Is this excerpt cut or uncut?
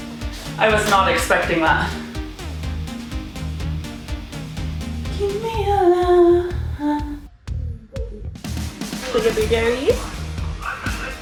uncut